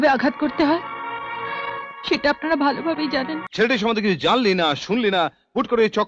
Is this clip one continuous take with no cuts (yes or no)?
no